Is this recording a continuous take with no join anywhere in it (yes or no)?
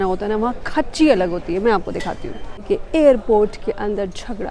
no